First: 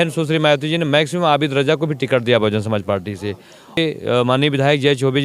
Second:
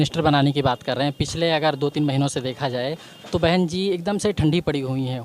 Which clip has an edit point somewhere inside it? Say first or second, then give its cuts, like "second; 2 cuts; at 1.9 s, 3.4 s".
first; 1 cut; at 3.8 s